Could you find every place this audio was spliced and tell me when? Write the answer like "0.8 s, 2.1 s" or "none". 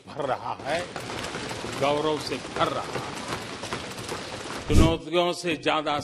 4.7 s